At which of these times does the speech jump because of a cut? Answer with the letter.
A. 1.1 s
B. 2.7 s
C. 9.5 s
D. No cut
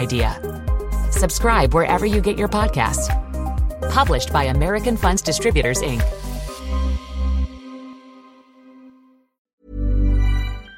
C